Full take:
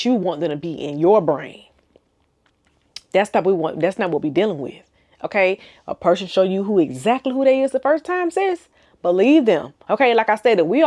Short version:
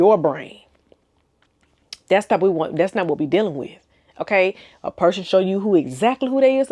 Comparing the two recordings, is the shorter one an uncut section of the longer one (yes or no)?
yes